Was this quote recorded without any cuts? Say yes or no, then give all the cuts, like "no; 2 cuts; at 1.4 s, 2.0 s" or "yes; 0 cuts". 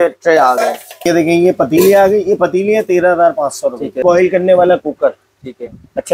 no; 2 cuts; at 1.1 s, 4.0 s